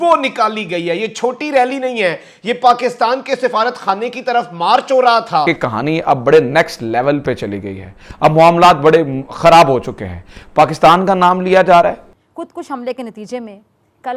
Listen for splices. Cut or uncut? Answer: cut